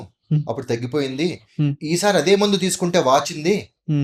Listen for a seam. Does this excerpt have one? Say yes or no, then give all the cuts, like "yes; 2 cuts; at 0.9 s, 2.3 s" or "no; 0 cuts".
no; 0 cuts